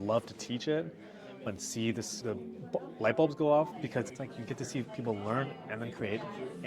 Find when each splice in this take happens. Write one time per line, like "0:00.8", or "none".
0:03.8